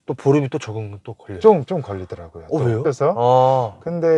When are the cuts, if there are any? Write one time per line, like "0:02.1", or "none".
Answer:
0:02.8